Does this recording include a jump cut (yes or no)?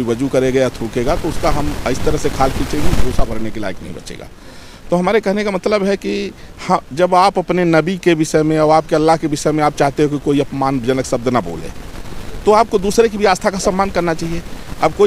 no